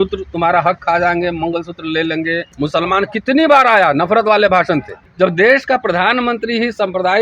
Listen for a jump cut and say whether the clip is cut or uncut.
cut